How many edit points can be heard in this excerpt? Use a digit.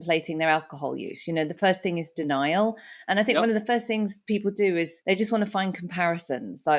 1